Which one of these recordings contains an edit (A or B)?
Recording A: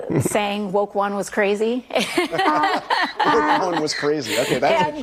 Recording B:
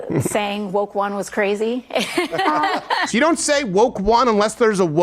B